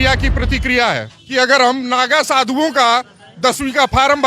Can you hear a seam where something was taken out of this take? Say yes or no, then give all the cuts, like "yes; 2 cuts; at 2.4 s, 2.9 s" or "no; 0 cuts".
yes; 1 cut; at 1.1 s